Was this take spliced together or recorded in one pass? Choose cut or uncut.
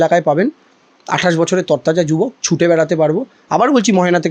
uncut